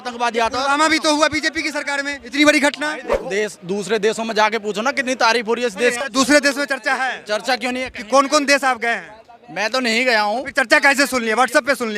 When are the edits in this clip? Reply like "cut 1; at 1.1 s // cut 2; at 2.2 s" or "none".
cut 1; at 3.2 s // cut 2; at 6.0 s